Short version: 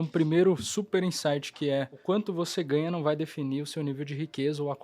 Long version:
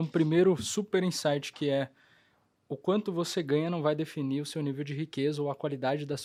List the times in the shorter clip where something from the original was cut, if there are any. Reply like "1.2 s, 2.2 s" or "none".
2.0 s